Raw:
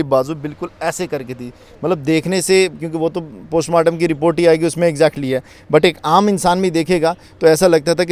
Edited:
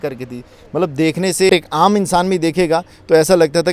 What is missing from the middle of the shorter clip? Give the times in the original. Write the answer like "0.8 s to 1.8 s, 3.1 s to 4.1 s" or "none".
2.6 s to 5.8 s